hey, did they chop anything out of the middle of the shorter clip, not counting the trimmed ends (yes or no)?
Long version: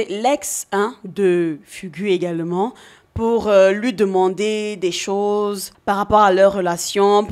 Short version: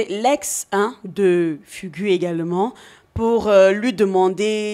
no